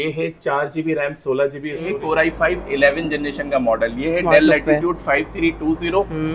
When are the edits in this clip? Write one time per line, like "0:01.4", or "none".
0:02.0